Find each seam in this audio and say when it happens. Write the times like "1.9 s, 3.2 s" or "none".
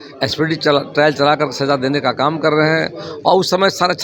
none